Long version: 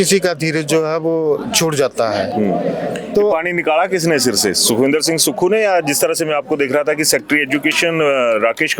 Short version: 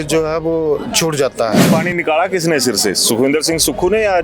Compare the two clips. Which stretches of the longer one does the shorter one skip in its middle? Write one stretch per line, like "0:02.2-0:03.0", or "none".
0:02.3-0:03.3